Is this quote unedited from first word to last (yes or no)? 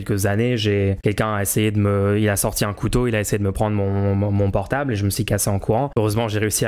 no